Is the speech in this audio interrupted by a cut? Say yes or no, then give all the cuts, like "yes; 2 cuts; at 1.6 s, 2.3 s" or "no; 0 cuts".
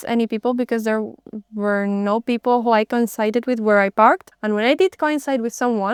no; 0 cuts